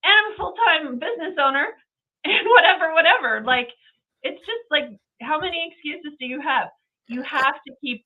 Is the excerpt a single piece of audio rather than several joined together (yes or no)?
yes